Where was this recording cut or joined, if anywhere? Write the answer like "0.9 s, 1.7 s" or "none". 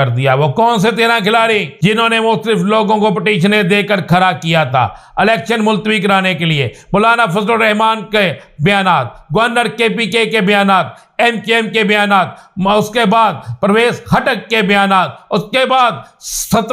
1.7 s